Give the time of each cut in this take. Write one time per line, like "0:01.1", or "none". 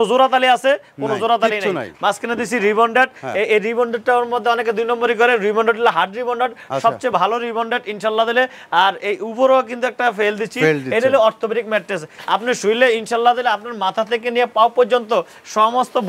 0:12.1